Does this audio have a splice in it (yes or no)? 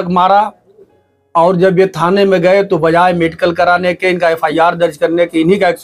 no